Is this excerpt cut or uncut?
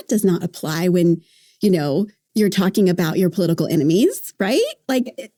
uncut